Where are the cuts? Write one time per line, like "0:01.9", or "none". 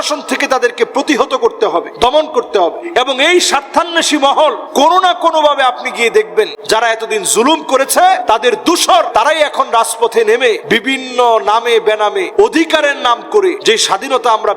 0:01.9
0:02.8
0:04.6
0:06.6
0:08.2
0:09.1
0:10.6
0:12.3
0:13.6